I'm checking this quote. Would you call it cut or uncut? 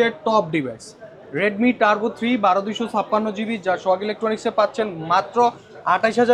uncut